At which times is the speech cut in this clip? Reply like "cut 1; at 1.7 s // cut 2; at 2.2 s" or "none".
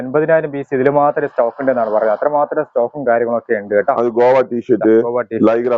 none